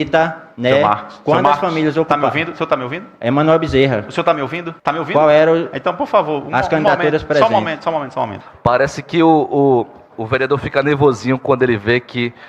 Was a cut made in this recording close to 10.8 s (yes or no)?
no